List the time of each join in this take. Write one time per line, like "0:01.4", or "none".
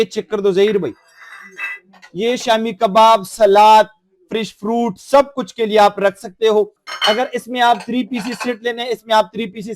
0:06.8